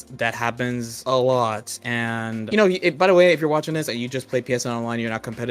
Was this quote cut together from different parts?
yes; 2 cuts; at 0.9 s, 2.4 s

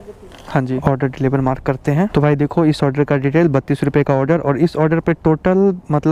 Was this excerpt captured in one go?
yes; 0 cuts

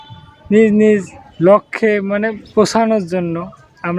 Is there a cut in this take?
yes; 1 cut; at 2.4 s

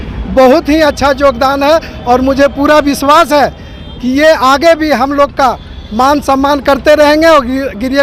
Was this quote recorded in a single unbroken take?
yes; 0 cuts

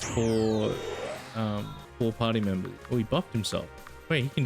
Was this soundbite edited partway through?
yes; 2 cuts; at 1.8 s, 2.8 s

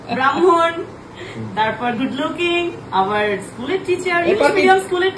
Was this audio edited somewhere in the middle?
no; 0 cuts

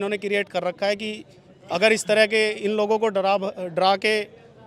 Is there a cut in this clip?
no; 0 cuts

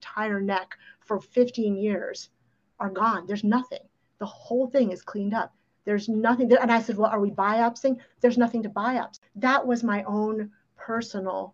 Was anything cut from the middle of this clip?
yes; 1 cut; at 9.3 s

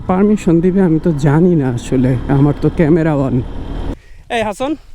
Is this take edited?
yes; 1 cut; at 3.9 s

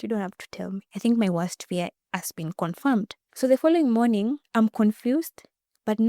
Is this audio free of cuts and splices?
no; 3 cuts; at 0.9 s, 3.2 s, 4.4 s

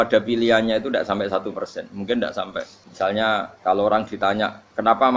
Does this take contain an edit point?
yes; 2 cuts; at 2.8 s, 3.5 s

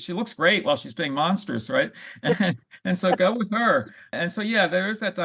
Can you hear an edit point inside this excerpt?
yes; 1 cut; at 4.0 s

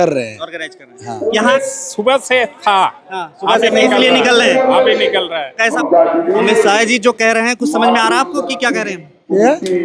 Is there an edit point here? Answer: yes; 2 cuts; at 1.4 s, 5.6 s

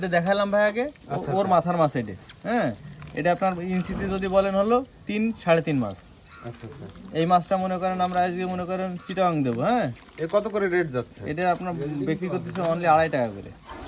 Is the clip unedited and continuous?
yes; 0 cuts

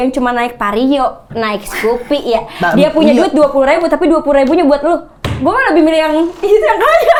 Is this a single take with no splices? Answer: yes; 0 cuts

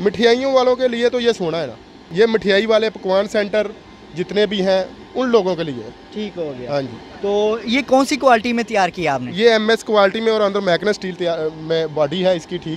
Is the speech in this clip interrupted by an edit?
no; 0 cuts

